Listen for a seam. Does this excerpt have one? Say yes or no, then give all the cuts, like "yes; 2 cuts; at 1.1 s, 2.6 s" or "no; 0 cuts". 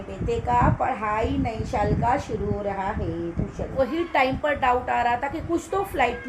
yes; 1 cut; at 3.7 s